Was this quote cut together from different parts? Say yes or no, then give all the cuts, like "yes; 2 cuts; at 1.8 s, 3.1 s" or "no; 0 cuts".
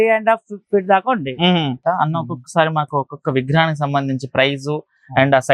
yes; 1 cut; at 1.8 s